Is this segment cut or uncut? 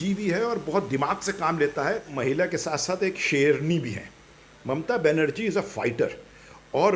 cut